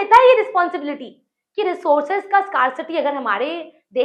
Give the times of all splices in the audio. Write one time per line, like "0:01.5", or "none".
none